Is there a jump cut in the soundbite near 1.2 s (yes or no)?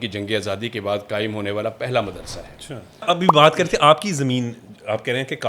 no